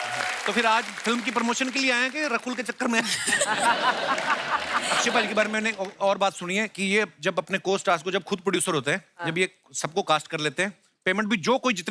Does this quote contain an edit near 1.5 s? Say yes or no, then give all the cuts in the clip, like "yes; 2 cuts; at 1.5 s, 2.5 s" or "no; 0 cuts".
no; 1 cut; at 4.8 s